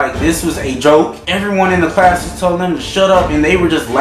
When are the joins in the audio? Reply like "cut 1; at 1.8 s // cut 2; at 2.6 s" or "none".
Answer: cut 1; at 1.2 s